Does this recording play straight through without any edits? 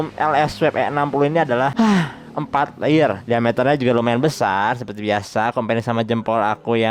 yes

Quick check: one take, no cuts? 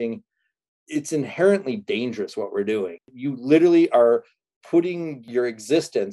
no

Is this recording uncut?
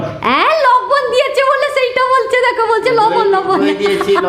yes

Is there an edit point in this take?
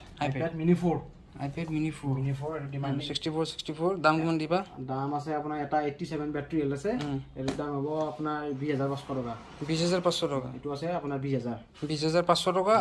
yes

